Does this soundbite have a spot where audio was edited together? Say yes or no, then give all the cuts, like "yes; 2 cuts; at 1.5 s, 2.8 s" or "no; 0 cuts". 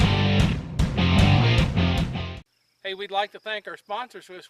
yes; 1 cut; at 2.2 s